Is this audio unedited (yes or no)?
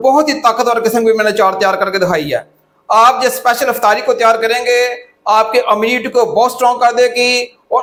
yes